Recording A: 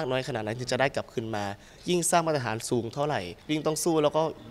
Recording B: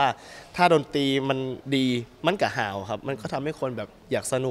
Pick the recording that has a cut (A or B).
A